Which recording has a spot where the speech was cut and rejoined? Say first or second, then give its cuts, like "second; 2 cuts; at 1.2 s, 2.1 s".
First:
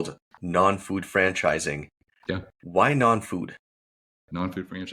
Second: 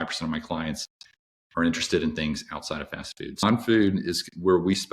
second; 1 cut; at 3.4 s